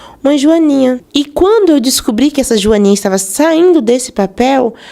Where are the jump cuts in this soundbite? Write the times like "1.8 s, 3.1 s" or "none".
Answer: 1.0 s